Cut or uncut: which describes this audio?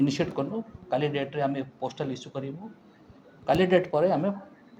uncut